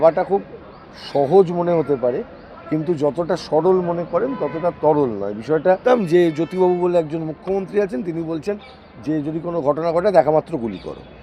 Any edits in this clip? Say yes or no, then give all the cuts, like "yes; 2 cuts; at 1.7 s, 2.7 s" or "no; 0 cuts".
yes; 1 cut; at 5.8 s